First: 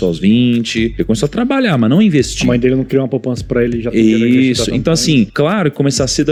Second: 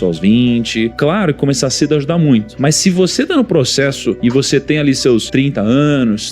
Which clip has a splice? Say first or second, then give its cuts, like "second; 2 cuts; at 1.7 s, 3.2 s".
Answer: second; 2 cuts; at 0.9 s, 2.5 s